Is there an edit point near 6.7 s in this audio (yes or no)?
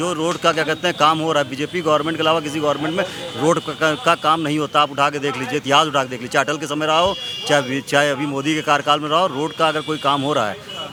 no